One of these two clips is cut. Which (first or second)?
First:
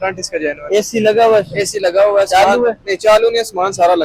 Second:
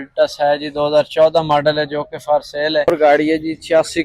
second